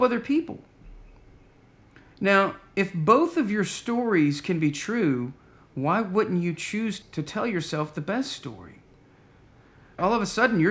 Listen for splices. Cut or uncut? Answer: cut